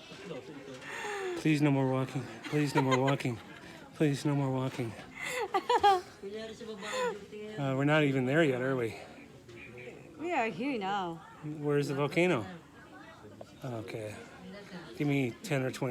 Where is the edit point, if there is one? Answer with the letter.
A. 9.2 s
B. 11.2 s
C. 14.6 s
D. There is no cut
D